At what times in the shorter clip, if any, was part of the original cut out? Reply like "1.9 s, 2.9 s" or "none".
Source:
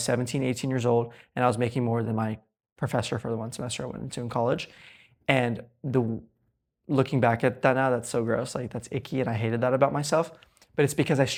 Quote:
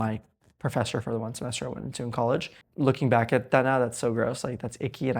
2.6 s